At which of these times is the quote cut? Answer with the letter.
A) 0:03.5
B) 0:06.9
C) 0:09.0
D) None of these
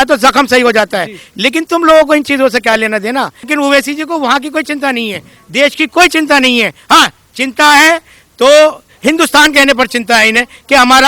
A